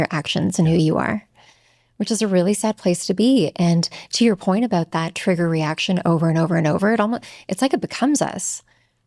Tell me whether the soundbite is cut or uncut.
uncut